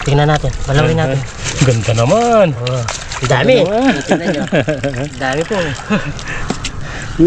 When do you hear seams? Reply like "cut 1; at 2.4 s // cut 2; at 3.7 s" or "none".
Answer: cut 1; at 1.4 s